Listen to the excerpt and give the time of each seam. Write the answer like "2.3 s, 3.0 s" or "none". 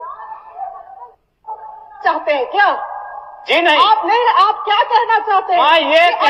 none